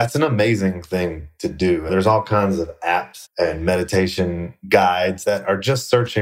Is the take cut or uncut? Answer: cut